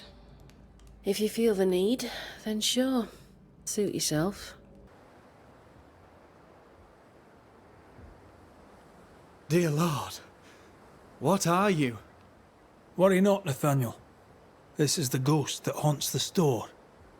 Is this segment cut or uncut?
cut